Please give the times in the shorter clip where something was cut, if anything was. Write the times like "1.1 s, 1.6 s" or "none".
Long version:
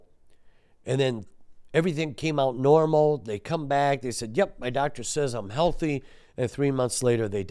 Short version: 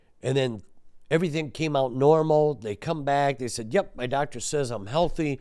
none